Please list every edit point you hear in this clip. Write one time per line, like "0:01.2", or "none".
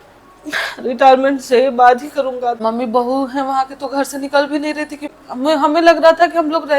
0:02.6
0:05.0